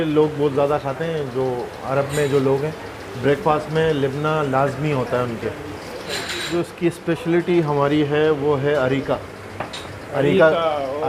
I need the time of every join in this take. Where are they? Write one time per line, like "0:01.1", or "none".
0:06.5